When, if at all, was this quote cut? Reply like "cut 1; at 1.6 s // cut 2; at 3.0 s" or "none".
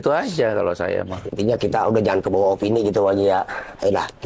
cut 1; at 1.4 s